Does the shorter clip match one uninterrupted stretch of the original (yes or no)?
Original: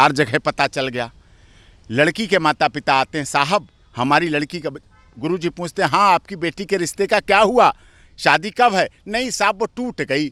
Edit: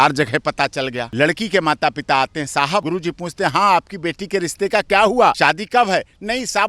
no